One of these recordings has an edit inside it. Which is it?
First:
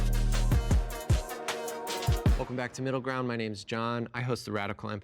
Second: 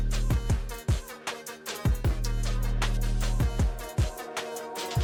first; 1 cut; at 3.1 s

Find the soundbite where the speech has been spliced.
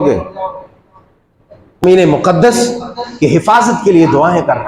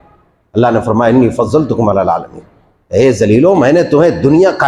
first; 1 cut; at 1.8 s

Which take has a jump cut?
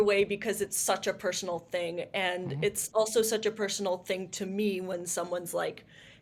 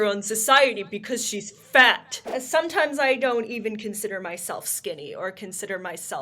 second; 1 cut; at 2.1 s

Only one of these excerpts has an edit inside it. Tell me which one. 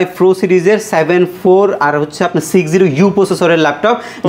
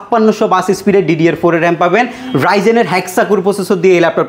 second; 1 cut; at 2.2 s

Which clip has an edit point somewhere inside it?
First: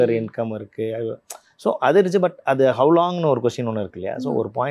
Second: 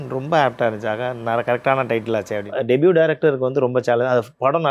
second; 1 cut; at 2.4 s

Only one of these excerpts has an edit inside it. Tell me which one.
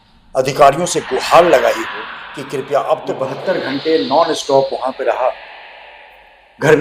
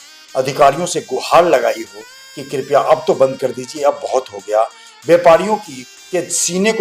first; 1 cut; at 3.3 s

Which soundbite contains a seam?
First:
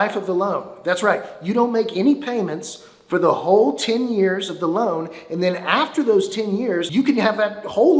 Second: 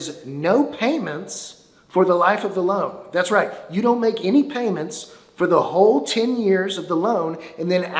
first; 1 cut; at 6.8 s

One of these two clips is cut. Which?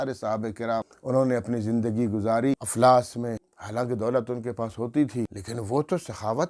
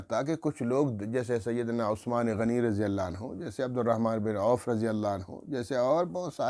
first; 4 cuts; at 0.9 s, 2.7 s, 3.5 s, 5.4 s

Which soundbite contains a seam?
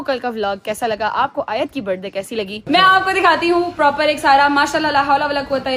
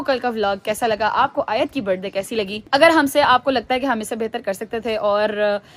first; 1 cut; at 2.5 s

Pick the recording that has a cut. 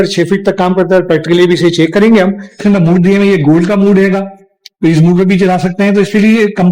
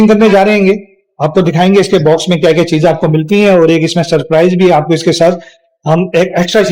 first; 1 cut; at 2.6 s

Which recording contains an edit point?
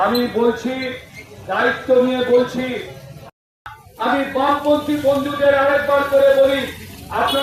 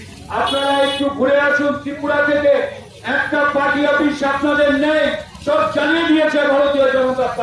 first; 1 cut; at 3.1 s

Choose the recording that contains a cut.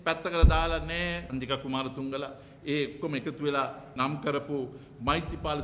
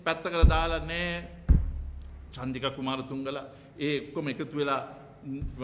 first; 2 cuts; at 1.2 s, 4.0 s

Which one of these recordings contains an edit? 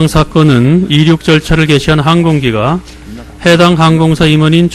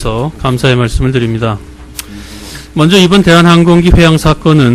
first; 1 cut; at 3.8 s

